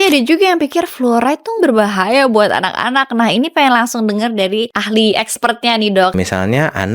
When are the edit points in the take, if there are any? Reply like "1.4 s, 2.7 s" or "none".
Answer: 1.6 s, 4.8 s, 6.1 s